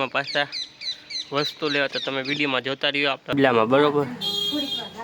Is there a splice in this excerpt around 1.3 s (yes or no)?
no